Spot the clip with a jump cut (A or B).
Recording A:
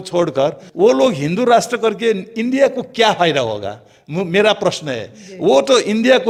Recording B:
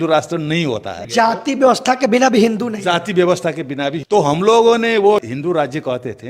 B